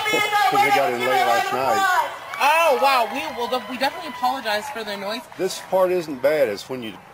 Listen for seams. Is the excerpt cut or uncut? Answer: uncut